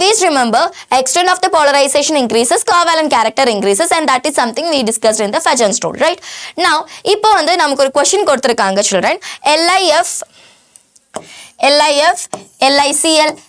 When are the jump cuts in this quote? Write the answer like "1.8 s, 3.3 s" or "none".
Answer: none